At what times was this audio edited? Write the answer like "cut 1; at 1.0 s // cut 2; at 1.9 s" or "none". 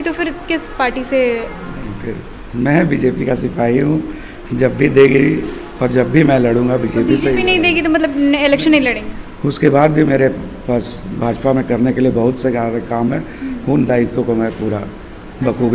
none